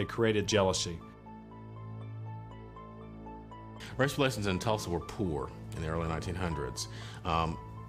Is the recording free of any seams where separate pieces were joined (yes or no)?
yes